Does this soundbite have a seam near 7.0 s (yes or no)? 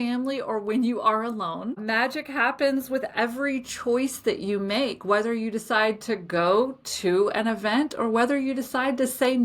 no